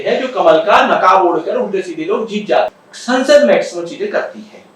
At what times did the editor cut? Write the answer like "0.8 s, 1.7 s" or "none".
2.7 s